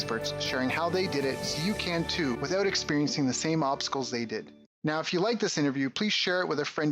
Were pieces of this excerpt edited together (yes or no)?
yes